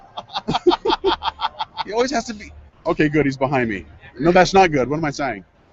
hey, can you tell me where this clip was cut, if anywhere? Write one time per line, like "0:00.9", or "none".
none